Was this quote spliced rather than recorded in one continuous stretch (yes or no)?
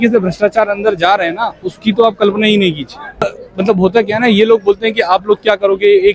yes